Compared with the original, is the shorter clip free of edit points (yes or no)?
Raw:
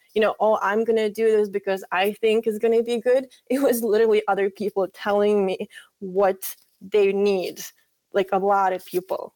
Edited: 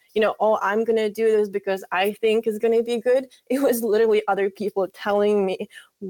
yes